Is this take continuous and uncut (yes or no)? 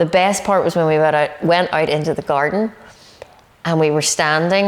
yes